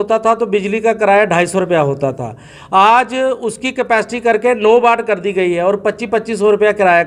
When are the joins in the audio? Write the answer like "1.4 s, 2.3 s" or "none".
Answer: none